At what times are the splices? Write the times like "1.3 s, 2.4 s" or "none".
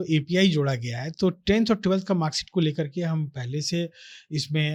none